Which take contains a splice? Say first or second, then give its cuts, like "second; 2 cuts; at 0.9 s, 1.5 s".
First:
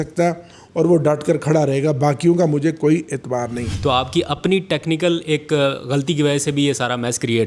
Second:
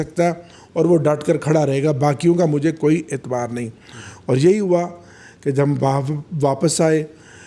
first; 1 cut; at 3.6 s